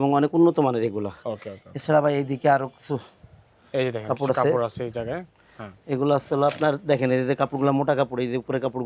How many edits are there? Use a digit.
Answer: 0